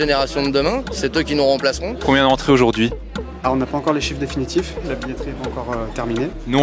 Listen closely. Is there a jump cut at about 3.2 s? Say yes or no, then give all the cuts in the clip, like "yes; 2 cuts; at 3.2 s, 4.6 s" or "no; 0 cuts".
no; 1 cut; at 2.0 s